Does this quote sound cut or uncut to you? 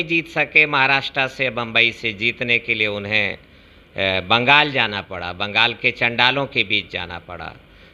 uncut